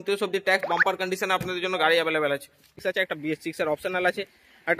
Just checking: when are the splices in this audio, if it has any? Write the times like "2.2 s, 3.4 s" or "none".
2.7 s